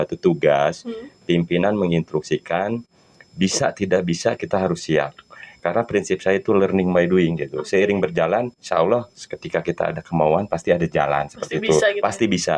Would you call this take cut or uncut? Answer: uncut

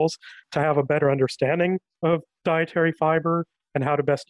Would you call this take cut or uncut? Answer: cut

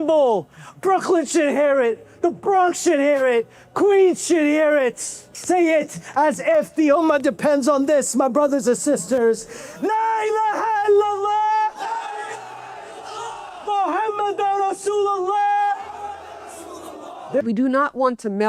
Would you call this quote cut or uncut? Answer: cut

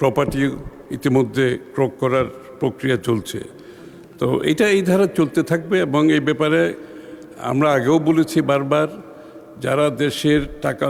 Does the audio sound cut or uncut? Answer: uncut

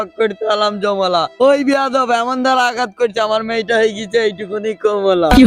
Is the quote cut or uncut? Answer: uncut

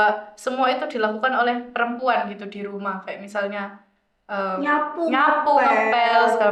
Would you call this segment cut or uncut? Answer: uncut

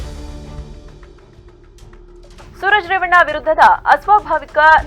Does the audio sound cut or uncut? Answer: cut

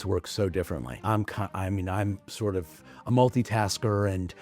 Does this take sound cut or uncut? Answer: cut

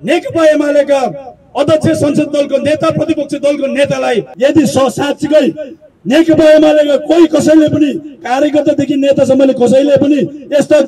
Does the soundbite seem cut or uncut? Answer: cut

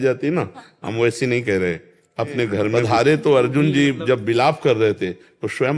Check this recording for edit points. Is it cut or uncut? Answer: cut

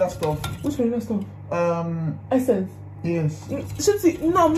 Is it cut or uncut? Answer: uncut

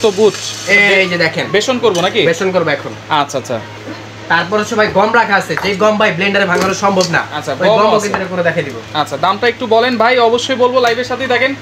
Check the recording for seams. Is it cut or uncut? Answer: uncut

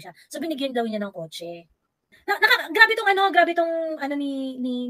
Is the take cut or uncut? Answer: cut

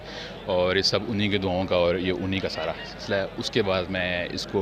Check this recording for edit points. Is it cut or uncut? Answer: uncut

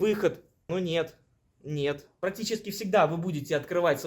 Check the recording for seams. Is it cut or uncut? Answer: cut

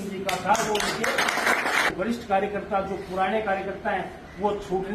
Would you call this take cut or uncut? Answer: cut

